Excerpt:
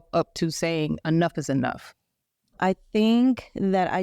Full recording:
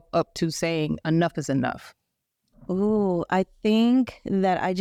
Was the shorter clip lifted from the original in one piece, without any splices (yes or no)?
no